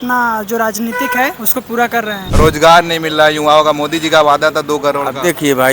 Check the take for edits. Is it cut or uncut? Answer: cut